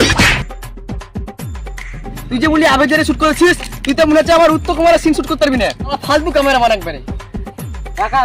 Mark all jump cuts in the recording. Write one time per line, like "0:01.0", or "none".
none